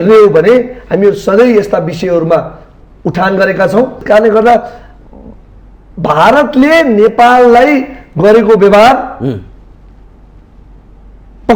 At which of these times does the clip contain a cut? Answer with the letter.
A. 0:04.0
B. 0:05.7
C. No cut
A